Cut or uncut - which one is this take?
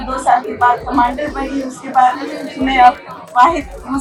uncut